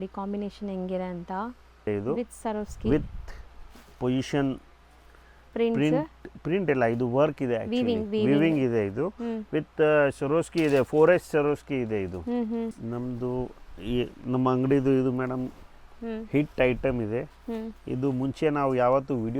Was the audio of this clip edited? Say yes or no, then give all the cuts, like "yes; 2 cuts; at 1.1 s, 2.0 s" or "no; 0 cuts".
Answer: yes; 2 cuts; at 1.9 s, 12.8 s